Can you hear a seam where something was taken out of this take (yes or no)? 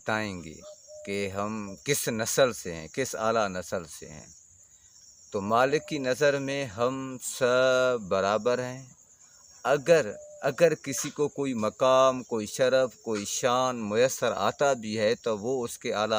no